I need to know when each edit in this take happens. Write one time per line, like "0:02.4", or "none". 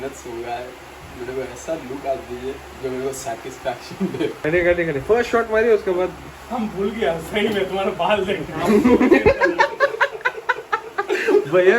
0:04.4

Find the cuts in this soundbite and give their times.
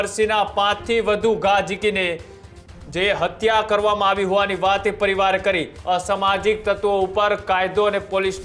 0:05.7

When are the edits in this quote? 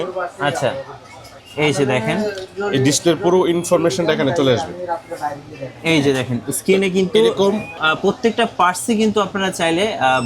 0:07.8

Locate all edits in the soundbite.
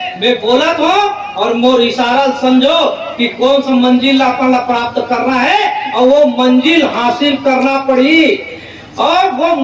none

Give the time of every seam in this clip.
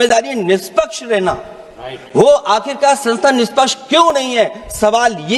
none

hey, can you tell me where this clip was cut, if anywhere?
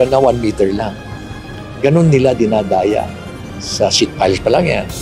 0:03.0

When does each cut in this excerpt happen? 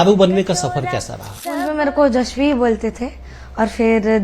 0:01.6

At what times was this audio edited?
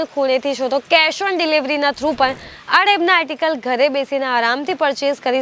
none

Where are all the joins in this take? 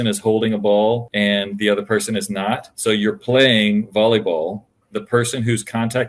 0:01.1
0:02.7
0:04.8

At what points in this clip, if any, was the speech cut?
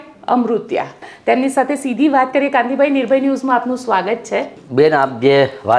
0:01.1
0:04.6

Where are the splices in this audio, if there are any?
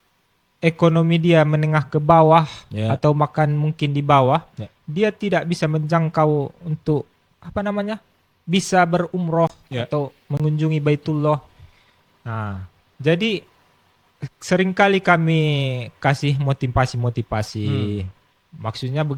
none

